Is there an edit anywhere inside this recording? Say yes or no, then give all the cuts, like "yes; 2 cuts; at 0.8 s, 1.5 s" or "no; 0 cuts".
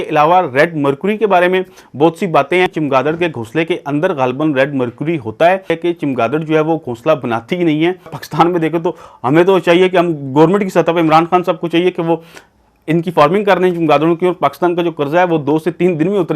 yes; 3 cuts; at 2.7 s, 5.7 s, 8.2 s